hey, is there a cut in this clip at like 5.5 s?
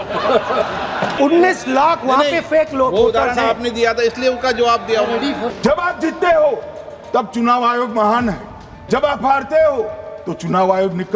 yes; 2 cuts; at 1.1 s, 5.5 s

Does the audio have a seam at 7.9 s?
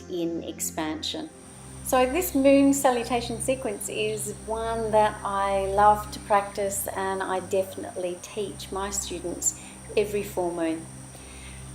no; 1 cut; at 5.9 s

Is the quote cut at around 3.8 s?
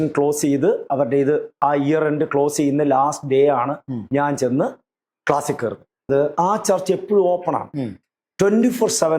no; 1 cut; at 6.1 s

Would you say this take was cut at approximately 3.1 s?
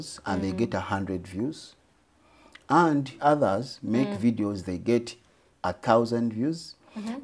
yes; 1 cut; at 3.1 s

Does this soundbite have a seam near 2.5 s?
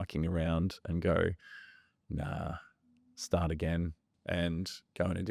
no; 1 cut; at 4.1 s

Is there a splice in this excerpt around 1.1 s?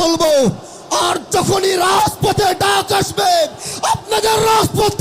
no; 0 cuts

